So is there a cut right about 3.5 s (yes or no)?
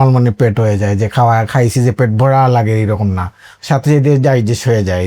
yes